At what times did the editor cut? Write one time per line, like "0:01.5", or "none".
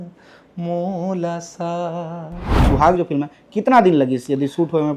0:02.7

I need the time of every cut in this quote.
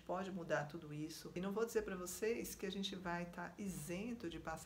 0:01.2

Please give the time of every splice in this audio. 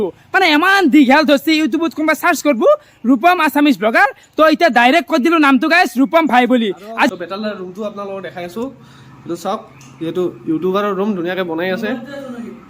0:07.1

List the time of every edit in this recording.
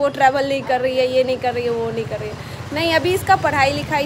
none

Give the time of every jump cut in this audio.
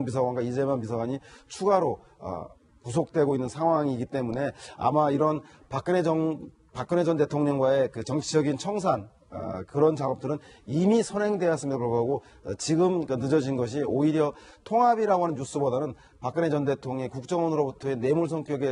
0:08.6

